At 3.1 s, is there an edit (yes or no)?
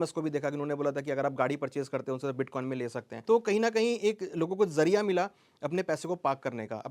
yes